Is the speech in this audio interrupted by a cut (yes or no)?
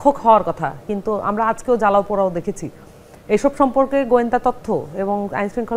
no